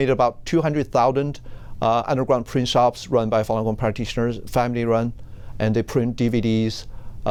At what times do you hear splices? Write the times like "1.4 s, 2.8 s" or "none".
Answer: none